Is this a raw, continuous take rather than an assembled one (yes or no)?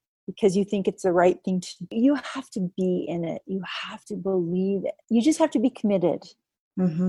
no